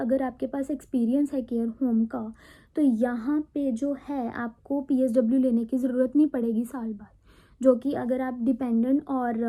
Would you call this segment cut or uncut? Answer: uncut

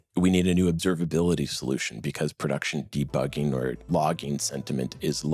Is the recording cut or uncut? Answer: cut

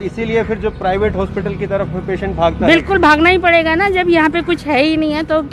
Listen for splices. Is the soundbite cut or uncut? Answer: uncut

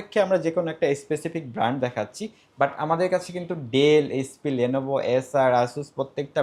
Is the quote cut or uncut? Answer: uncut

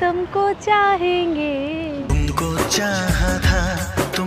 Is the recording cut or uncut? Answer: uncut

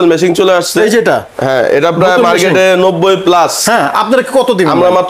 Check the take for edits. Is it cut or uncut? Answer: uncut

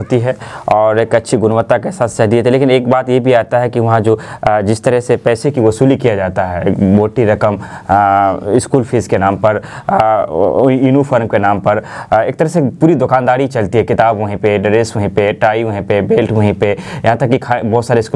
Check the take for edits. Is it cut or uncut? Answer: uncut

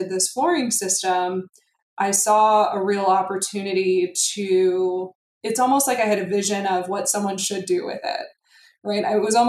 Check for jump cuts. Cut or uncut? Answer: uncut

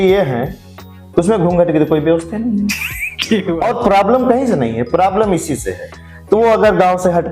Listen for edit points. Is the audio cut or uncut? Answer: cut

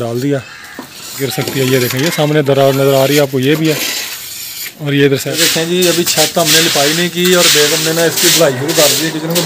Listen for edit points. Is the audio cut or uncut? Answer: cut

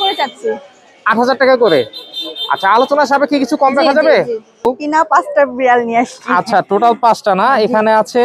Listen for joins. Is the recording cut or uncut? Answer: cut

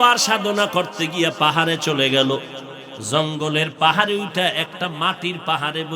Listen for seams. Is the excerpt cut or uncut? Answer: uncut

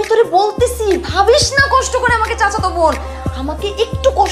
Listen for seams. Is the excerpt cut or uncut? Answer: uncut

